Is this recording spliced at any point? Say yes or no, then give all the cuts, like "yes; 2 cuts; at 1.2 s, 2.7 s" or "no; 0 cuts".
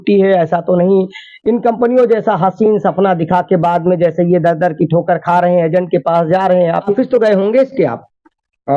yes; 1 cut; at 6.9 s